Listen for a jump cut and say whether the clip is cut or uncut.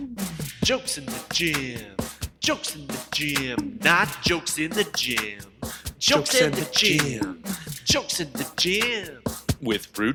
uncut